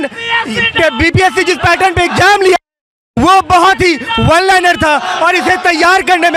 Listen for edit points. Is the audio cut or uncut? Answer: uncut